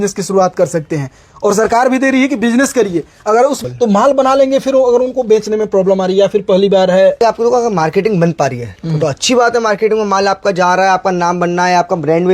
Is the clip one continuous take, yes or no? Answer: no